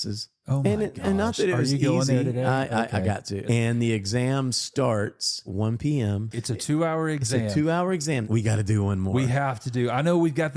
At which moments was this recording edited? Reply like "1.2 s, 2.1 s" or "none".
3.4 s, 5.5 s, 6.3 s, 8.2 s